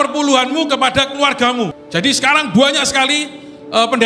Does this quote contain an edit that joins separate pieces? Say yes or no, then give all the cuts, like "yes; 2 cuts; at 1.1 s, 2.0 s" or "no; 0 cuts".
yes; 1 cut; at 1.8 s